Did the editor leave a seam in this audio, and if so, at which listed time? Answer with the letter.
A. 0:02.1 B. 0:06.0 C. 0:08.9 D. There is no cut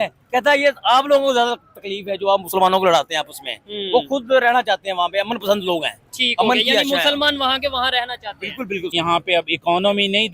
C